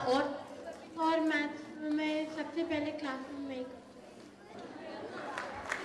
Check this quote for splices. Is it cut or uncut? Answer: uncut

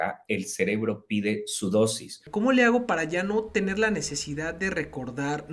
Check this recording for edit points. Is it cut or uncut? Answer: cut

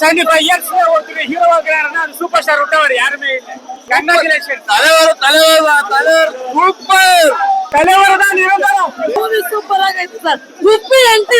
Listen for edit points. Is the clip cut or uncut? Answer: cut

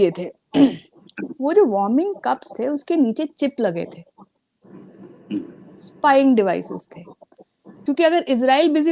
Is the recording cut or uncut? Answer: cut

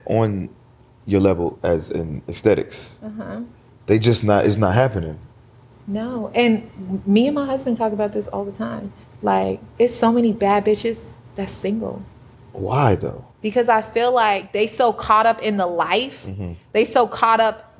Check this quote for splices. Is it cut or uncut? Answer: uncut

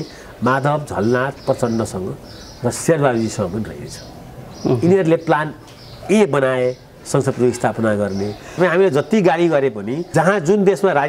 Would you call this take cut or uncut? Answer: cut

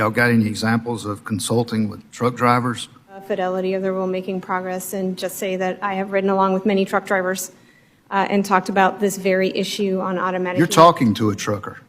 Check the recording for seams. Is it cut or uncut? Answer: cut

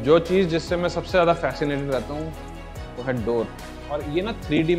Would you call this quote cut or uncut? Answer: cut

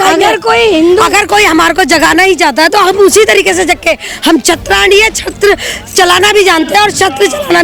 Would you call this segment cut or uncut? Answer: uncut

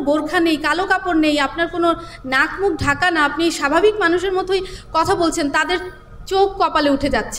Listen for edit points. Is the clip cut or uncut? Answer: uncut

